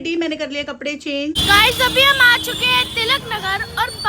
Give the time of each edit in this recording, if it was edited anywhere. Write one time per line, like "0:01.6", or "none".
0:01.4